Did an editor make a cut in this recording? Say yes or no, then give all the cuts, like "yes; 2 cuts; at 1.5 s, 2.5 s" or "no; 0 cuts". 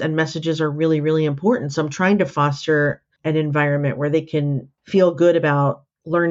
no; 0 cuts